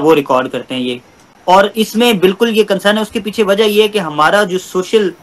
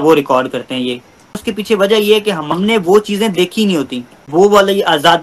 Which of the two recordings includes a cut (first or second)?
second